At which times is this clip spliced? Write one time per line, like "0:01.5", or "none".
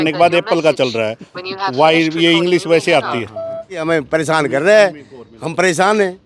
0:03.8